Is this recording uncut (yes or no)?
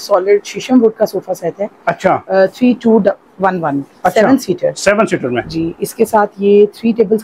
yes